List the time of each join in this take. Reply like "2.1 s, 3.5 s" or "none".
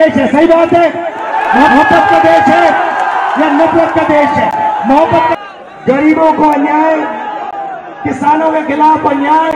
5.4 s